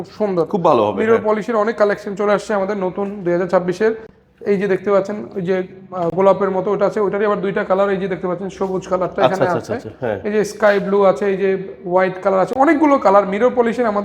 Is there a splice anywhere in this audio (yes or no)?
no